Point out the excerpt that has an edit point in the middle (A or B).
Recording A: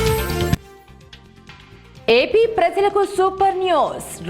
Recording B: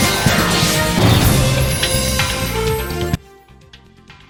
A